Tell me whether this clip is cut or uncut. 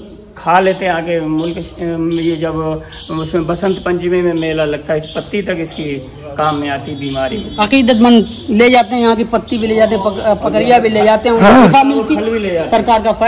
uncut